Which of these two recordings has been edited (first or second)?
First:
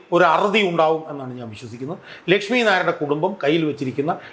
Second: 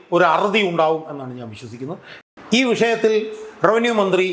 second